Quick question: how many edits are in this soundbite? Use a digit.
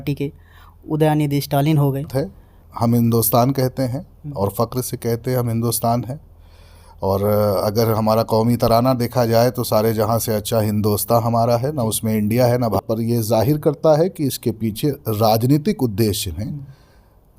2